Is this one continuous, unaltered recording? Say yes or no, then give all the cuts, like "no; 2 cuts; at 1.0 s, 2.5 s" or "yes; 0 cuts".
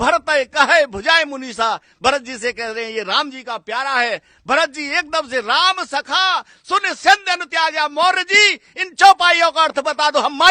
yes; 0 cuts